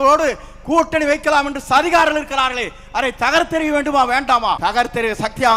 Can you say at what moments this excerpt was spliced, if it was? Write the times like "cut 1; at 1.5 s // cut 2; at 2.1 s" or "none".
cut 1; at 4.6 s